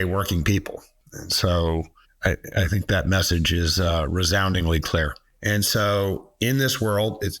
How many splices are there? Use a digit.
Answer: 3